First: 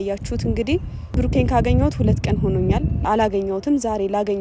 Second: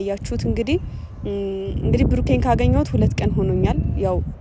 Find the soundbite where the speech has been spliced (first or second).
first